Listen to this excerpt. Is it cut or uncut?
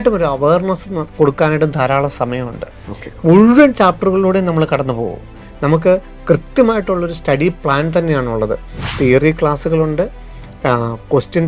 cut